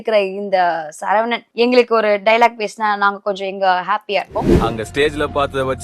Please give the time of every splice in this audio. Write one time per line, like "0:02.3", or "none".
0:04.5